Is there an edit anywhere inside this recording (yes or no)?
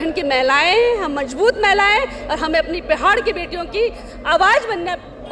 no